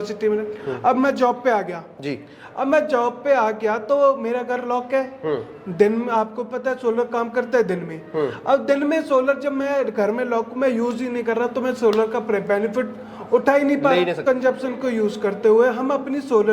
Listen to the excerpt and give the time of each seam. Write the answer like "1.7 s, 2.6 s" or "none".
14.2 s

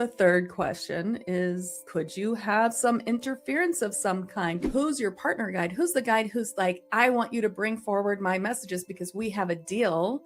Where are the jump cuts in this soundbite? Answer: 4.6 s

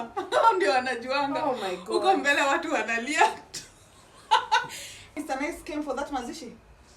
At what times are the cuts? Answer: 5.2 s

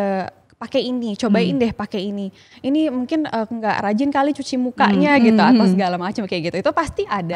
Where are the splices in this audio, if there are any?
none

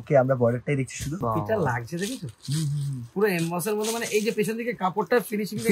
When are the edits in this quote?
1.2 s

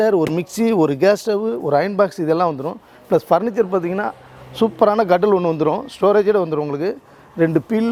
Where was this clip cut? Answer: none

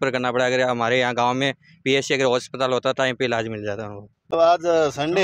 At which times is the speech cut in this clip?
4.3 s

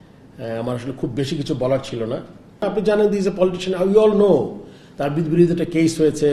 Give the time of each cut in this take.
2.6 s

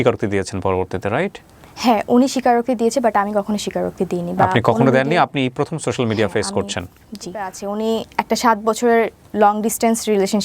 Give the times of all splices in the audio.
7.6 s

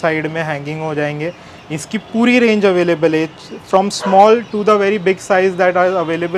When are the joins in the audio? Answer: none

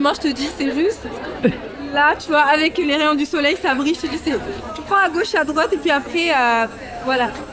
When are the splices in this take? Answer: 4.6 s

